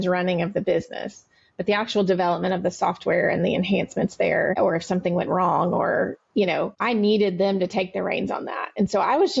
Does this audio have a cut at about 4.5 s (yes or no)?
yes